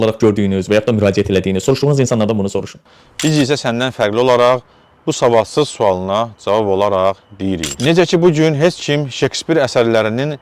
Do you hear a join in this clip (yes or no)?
yes